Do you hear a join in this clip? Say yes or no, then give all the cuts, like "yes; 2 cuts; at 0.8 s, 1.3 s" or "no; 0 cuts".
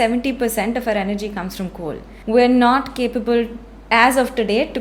yes; 1 cut; at 2.1 s